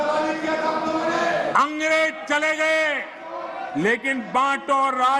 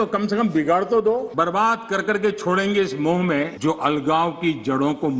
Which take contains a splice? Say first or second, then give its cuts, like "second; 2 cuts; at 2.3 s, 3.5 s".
second; 2 cuts; at 1.3 s, 3.5 s